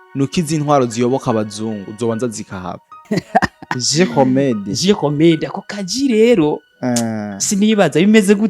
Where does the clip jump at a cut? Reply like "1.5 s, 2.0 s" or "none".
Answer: 3.0 s

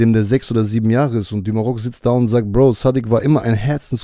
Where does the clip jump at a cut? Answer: none

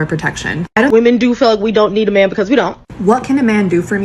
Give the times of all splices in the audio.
0.9 s

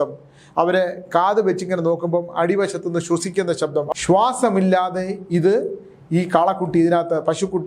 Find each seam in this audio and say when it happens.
3.9 s

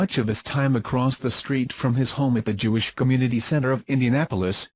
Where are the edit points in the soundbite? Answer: 3.3 s

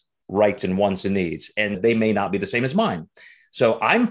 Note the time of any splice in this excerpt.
1.8 s

